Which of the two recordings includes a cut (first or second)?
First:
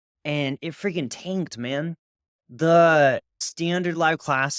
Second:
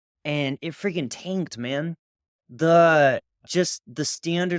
first